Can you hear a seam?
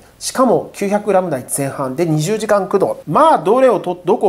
yes; 1 cut; at 3.0 s

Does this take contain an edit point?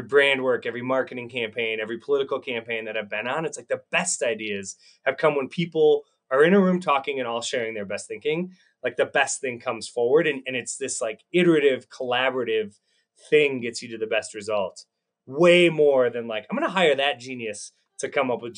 no; 0 cuts

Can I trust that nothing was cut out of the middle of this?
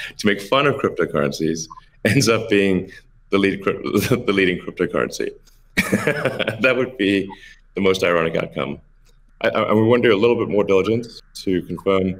no; 1 cut; at 9.2 s

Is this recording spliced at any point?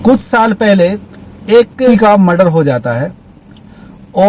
yes; 1 cut; at 1.9 s

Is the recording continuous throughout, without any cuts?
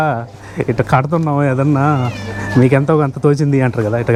yes; 0 cuts

